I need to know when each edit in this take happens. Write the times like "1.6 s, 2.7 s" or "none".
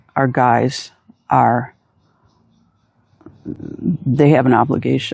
none